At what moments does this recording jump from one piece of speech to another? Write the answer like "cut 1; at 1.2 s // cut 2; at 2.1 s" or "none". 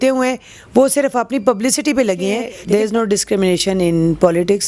cut 1; at 2.5 s